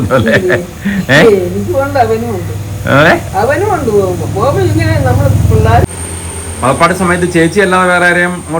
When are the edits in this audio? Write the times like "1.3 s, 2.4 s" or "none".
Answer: 5.8 s